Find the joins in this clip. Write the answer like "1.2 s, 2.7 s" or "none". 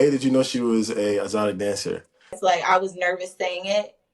2.4 s

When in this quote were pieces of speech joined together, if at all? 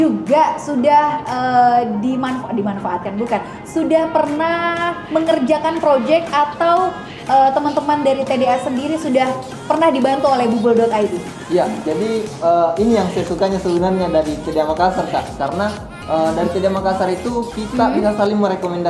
none

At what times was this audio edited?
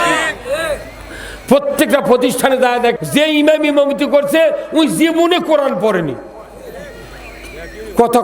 3.0 s

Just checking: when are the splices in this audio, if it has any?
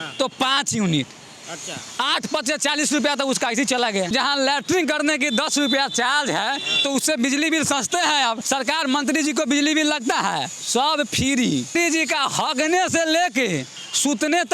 4.1 s, 8.4 s, 11.7 s

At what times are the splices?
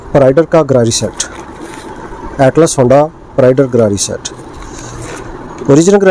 none

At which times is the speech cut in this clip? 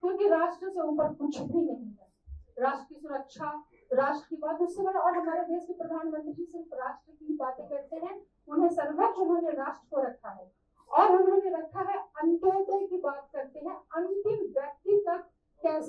none

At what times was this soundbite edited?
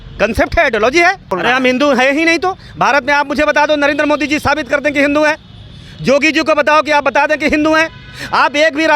1.3 s

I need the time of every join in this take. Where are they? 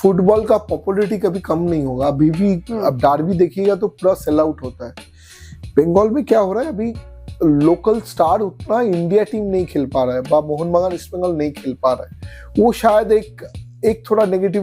none

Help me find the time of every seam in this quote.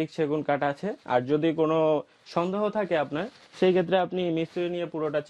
none

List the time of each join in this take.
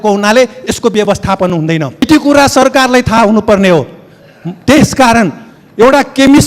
2.1 s

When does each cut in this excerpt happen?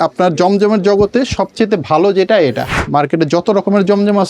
2.8 s

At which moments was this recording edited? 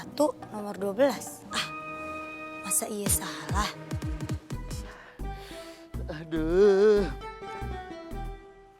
4.6 s

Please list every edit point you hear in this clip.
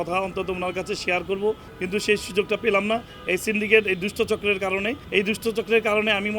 1.7 s, 5.0 s

